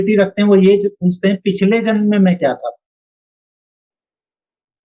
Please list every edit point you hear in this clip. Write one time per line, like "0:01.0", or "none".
none